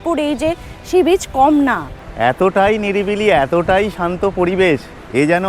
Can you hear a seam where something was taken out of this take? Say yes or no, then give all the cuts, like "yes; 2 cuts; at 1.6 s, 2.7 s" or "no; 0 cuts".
yes; 1 cut; at 2.0 s